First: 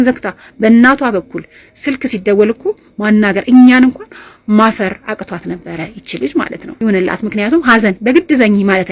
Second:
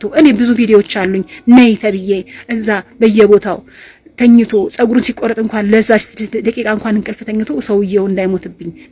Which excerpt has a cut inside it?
first; 1 cut; at 6.6 s

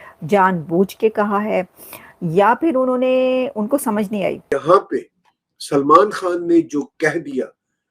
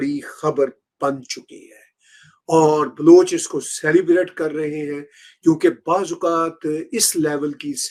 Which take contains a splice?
first; 1 cut; at 4.4 s

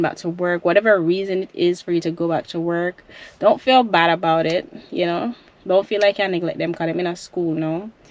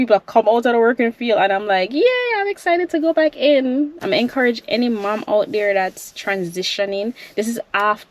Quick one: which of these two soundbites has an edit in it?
second; 1 cut; at 3.9 s

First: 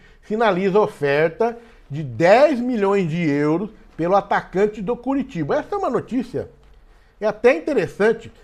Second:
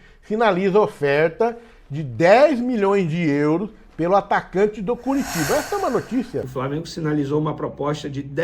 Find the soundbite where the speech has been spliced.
second; 1 cut; at 6.5 s

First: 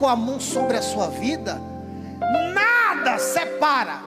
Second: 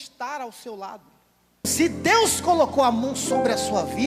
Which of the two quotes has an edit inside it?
second; 1 cut; at 1.7 s

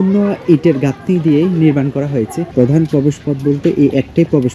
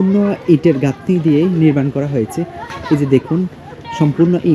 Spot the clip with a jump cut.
first; 1 cut; at 2.4 s

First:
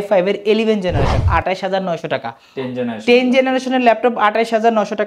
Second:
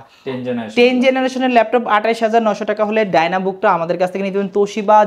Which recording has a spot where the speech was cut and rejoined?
first; 1 cut; at 1.3 s

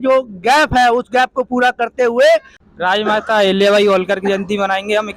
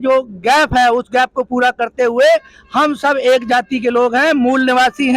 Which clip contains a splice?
first; 1 cut; at 2.6 s

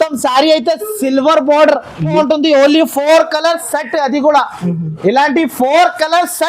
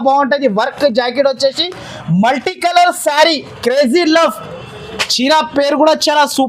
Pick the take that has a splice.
first; 1 cut; at 2.1 s

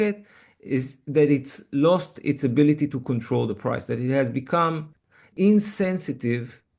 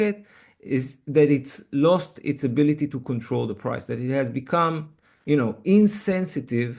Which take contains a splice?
first; 1 cut; at 5.2 s

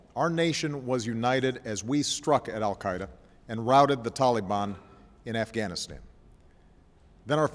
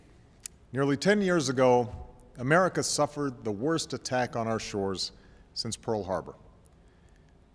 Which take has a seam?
first; 1 cut; at 2.9 s

